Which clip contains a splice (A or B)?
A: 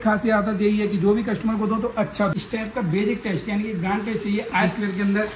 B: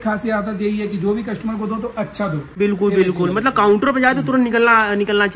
A